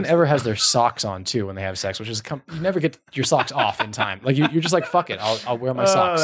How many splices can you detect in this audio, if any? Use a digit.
0